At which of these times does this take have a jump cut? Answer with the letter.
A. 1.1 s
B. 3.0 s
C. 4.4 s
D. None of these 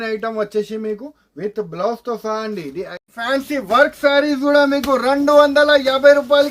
B